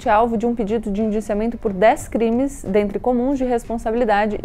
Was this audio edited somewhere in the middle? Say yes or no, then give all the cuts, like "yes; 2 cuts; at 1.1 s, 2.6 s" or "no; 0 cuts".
no; 0 cuts